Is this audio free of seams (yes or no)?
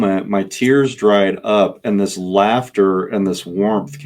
yes